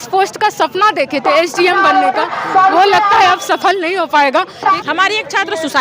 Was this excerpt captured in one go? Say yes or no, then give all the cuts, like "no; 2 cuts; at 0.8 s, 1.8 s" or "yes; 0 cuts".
no; 1 cut; at 4.8 s